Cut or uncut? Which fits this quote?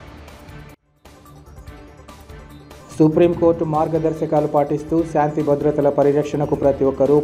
uncut